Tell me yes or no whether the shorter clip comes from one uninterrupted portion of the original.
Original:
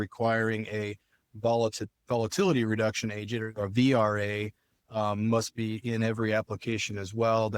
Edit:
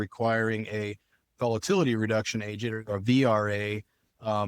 no